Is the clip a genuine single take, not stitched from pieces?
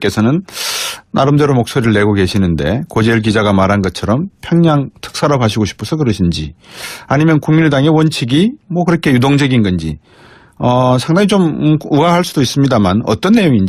yes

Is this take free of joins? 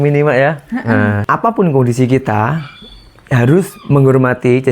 no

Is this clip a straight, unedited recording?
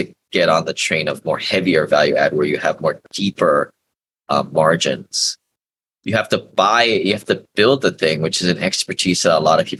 yes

